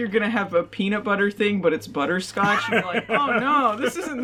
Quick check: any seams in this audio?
no; 0 cuts

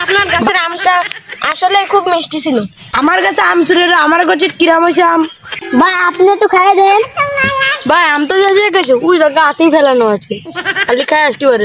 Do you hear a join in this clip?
no; 0 cuts

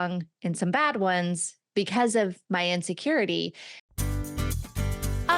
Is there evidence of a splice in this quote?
yes; 1 cut; at 4.0 s

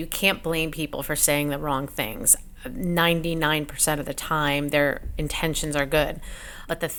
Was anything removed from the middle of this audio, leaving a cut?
no; 0 cuts

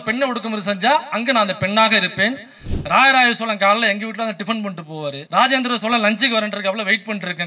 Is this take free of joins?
no; 2 cuts; at 2.5 s, 5.2 s

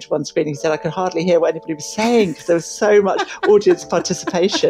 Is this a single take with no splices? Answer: yes; 0 cuts

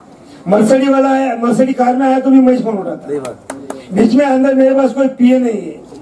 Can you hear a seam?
no; 0 cuts

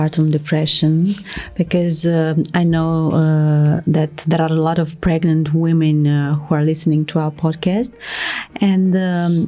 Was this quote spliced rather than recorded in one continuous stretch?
no; 0 cuts

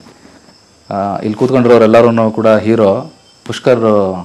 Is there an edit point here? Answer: no; 0 cuts

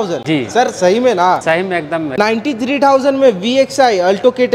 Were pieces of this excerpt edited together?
no; 0 cuts

